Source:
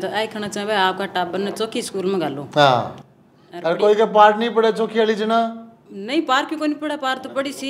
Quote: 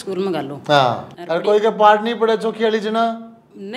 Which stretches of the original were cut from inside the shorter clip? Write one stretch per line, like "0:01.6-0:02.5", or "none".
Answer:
0:03.0-0:03.5